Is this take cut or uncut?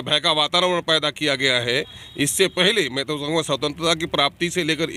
uncut